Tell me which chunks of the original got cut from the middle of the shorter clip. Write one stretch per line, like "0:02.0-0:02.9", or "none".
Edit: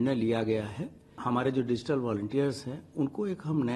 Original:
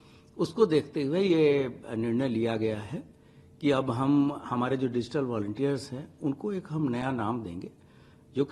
0:03.3-0:04.4